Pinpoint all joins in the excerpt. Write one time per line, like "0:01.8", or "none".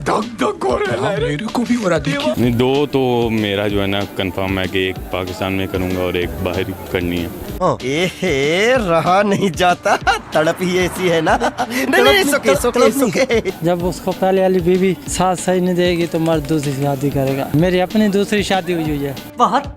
0:02.3
0:06.8
0:13.5
0:15.1
0:17.5